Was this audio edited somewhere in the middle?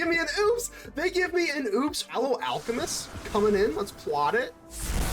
yes; 1 cut; at 2.0 s

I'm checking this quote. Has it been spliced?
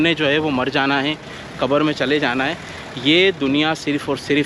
no; 0 cuts

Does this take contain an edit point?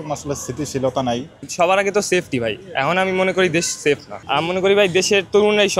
yes; 2 cuts; at 1.4 s, 4.2 s

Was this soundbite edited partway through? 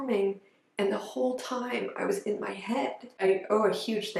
yes; 1 cut; at 3.1 s

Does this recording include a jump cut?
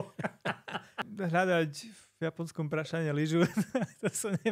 yes; 1 cut; at 1.1 s

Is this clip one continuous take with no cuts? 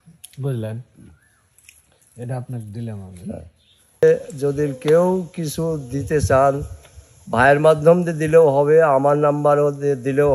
no; 1 cut; at 4.0 s

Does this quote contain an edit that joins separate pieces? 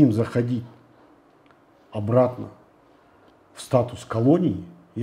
no; 0 cuts

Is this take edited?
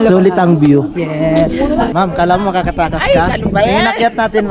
yes; 1 cut; at 1.9 s

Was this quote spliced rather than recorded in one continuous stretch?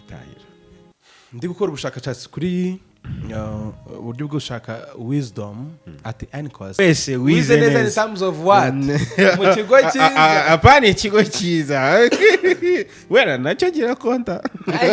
yes; 1 cut; at 6.8 s

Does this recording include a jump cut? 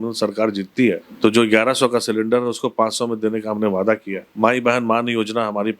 yes; 2 cuts; at 1.1 s, 4.3 s

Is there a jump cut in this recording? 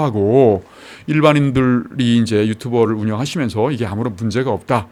no; 0 cuts

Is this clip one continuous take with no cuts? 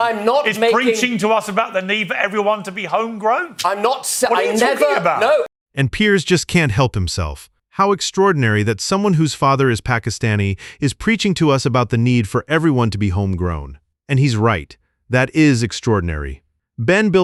yes; 0 cuts

